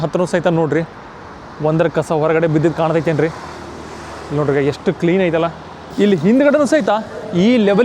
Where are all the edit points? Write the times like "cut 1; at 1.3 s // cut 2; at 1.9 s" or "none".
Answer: cut 1; at 5.8 s